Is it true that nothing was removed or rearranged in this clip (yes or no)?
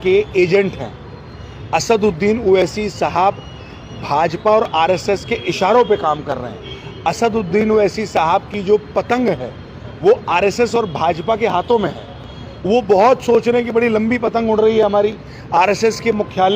yes